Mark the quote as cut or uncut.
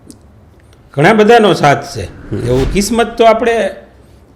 cut